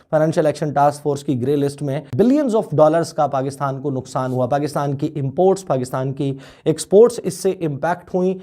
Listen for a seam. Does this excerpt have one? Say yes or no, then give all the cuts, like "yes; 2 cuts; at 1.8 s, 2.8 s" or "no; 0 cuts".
yes; 1 cut; at 2.1 s